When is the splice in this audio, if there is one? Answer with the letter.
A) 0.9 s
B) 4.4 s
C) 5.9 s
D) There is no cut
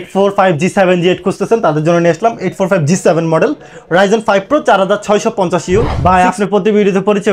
C